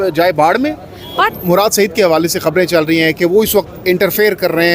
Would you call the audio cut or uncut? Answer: cut